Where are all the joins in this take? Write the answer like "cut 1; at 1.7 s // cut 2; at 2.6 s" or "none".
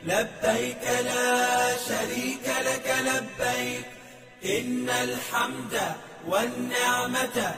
cut 1; at 1.1 s